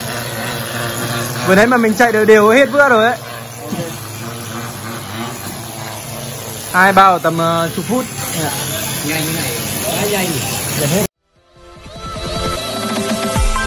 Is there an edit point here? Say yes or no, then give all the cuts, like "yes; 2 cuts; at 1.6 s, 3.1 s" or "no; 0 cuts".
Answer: yes; 1 cut; at 11.1 s